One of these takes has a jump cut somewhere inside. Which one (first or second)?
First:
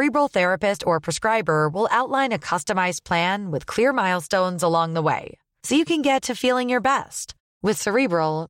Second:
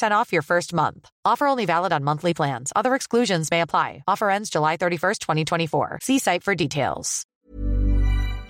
second